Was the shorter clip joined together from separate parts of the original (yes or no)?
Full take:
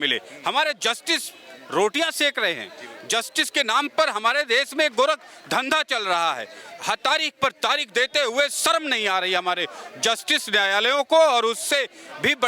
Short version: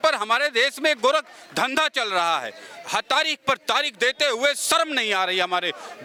no